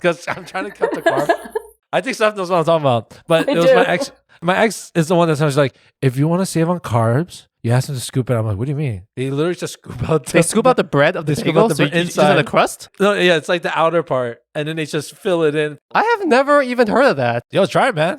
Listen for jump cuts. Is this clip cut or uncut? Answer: cut